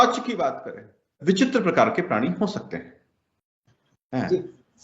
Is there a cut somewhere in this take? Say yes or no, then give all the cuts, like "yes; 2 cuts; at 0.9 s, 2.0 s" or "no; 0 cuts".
yes; 1 cut; at 1.1 s